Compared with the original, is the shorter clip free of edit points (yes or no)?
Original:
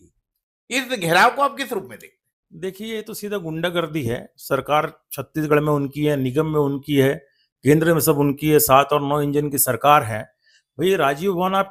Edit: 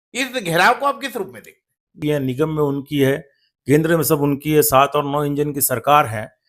no